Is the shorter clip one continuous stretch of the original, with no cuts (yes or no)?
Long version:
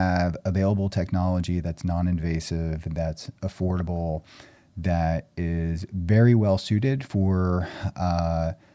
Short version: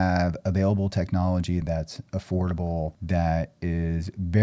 no